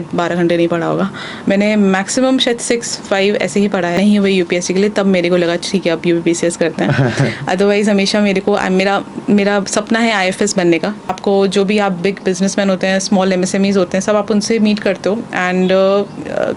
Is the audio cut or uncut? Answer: cut